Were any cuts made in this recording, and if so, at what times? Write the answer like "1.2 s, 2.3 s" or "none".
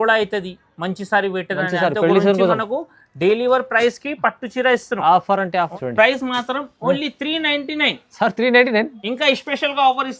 5.7 s